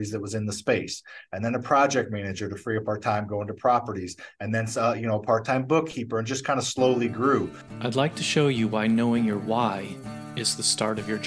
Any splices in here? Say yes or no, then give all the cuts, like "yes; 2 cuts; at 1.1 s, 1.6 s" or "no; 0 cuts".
yes; 1 cut; at 7.6 s